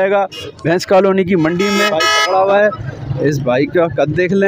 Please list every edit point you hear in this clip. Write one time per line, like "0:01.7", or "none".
0:01.9